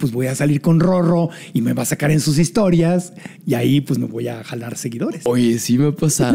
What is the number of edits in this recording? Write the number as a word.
one